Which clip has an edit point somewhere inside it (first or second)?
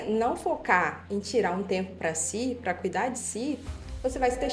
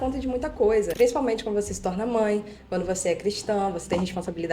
second